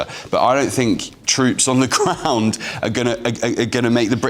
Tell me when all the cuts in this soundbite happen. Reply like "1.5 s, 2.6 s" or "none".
none